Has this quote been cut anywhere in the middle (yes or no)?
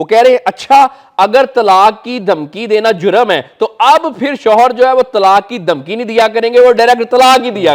no